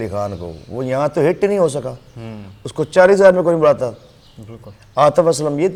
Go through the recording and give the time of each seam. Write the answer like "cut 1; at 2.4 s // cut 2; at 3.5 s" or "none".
none